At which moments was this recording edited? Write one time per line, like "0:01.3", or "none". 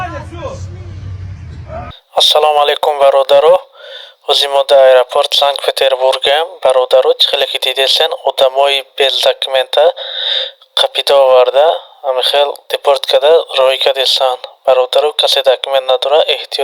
0:02.0